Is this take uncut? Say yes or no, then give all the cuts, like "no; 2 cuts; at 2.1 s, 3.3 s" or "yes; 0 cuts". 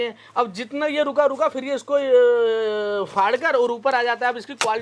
yes; 0 cuts